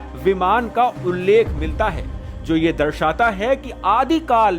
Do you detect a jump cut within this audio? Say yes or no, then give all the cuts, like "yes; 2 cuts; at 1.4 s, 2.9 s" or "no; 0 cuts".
no; 0 cuts